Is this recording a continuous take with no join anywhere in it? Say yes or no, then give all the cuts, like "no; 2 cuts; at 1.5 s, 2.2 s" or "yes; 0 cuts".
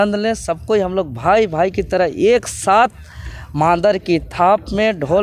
yes; 0 cuts